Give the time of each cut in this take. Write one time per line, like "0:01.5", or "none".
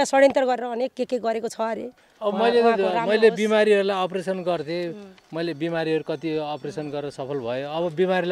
0:02.0